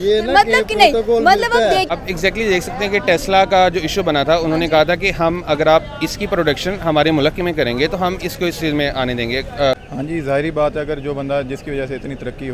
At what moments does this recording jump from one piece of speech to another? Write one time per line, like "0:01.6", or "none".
0:01.9
0:09.8